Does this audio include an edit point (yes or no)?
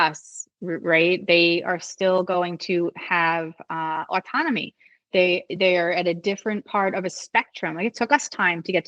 no